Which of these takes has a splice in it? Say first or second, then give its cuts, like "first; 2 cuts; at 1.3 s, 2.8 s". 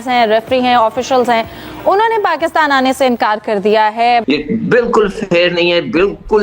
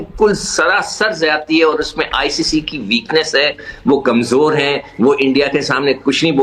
first; 1 cut; at 4.2 s